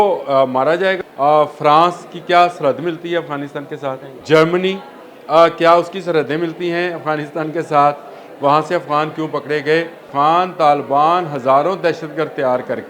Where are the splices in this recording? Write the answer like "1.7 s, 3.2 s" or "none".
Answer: 1.0 s, 4.1 s, 10.0 s